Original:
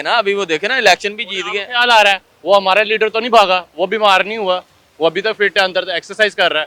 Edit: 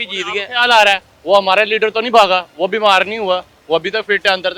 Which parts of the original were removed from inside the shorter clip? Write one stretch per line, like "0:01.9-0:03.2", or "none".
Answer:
0:04.7-0:04.8